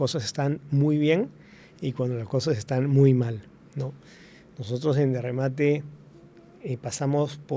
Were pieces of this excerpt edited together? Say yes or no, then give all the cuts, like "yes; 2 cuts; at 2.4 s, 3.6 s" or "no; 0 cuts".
no; 0 cuts